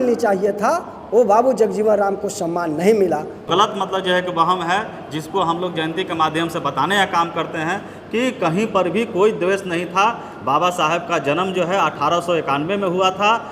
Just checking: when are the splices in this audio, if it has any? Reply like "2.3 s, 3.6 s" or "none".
3.5 s